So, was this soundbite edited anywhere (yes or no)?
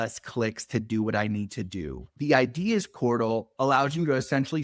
yes